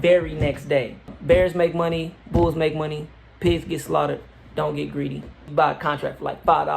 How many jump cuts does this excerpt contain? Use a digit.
2